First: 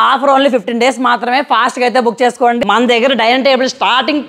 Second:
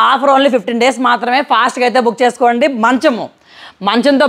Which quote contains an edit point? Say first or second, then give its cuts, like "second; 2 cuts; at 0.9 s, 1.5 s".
first; 1 cut; at 2.6 s